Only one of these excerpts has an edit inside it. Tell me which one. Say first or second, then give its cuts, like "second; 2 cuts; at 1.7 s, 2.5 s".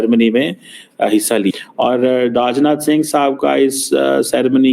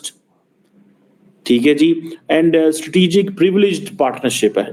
first; 1 cut; at 1.5 s